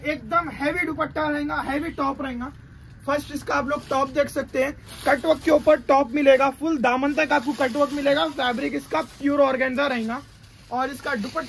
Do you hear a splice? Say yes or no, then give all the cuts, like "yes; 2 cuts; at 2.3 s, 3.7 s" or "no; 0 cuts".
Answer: no; 0 cuts